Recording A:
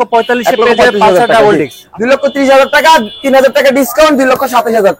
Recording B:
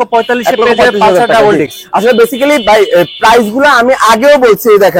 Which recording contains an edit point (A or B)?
A